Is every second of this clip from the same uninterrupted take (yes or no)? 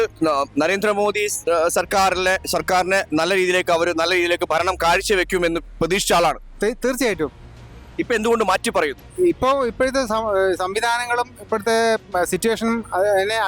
yes